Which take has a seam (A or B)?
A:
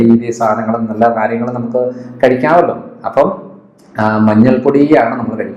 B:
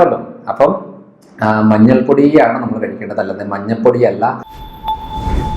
B